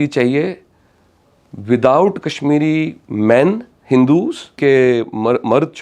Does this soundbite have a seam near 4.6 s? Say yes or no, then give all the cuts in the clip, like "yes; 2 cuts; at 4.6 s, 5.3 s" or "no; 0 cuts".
yes; 1 cut; at 4.6 s